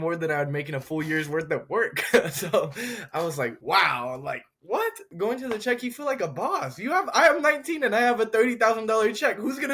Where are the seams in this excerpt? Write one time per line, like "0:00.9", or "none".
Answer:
0:03.6
0:05.1